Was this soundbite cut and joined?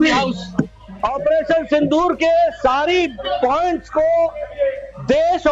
yes; 1 cut; at 1.0 s

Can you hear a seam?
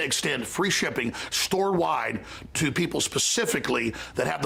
no; 0 cuts

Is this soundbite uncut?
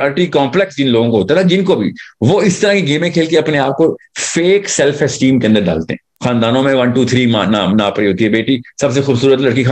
no; 1 cut; at 6.1 s

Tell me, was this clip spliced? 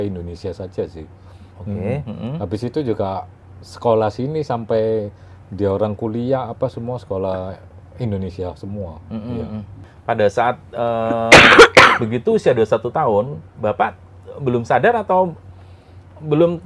yes; 1 cut; at 9.8 s

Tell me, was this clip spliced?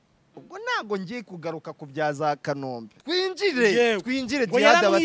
yes; 1 cut; at 2.9 s

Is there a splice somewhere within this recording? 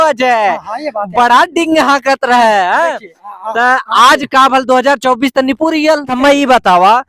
yes; 1 cut; at 6.1 s

